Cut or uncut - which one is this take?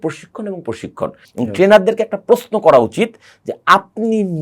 cut